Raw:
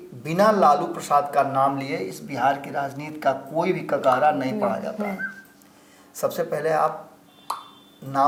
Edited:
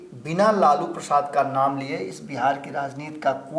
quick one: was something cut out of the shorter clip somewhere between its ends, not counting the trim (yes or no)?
no